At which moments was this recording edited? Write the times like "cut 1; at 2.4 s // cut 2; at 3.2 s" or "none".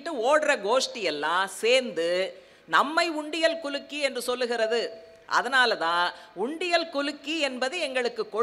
none